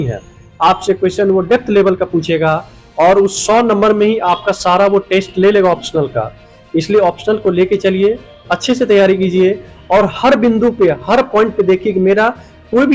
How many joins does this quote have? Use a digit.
0